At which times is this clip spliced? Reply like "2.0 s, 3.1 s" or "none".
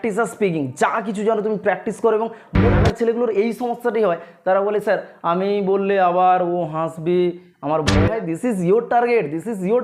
2.7 s, 8.1 s